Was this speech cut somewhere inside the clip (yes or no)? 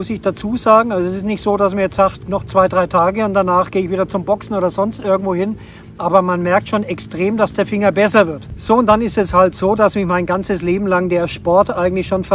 no